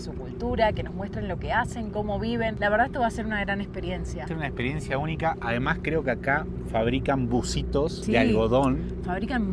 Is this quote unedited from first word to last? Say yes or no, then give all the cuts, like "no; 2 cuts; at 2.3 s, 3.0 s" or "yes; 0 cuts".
yes; 0 cuts